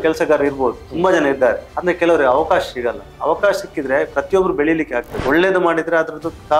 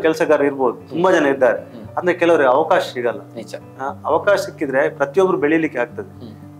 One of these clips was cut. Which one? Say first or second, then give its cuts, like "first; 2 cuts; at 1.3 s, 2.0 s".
first; 3 cuts; at 1.7 s, 3.1 s, 5.1 s